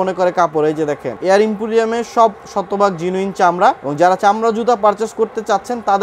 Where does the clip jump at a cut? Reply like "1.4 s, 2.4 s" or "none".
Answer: 1.1 s, 3.8 s